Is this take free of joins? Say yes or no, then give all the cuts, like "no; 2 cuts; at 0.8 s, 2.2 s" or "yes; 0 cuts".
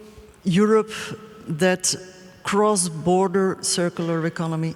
yes; 0 cuts